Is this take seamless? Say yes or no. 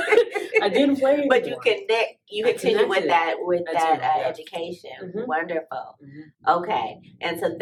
yes